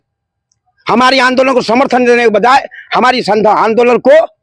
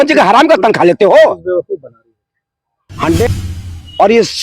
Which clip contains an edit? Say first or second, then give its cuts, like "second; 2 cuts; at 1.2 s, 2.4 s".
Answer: second; 1 cut; at 3.3 s